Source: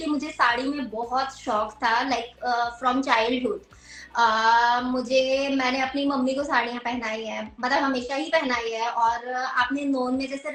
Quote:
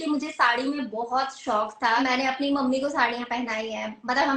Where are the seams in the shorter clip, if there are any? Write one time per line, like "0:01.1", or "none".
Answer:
0:02.0

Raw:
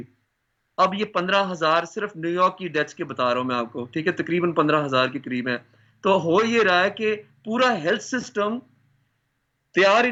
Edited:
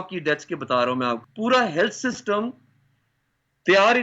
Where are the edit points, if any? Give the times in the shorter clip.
0:01.3

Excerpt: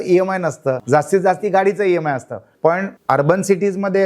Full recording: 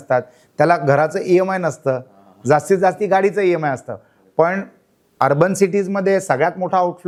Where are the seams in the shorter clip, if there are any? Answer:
0:00.8
0:02.6

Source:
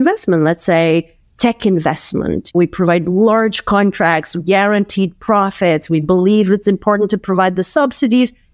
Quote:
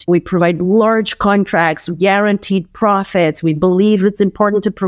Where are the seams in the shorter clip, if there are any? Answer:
none

